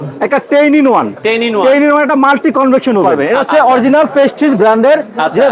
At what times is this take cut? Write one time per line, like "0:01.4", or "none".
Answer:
0:03.3